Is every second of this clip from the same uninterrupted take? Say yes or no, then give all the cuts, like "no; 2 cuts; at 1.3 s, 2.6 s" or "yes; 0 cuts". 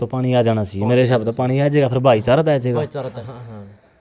no; 1 cut; at 3.1 s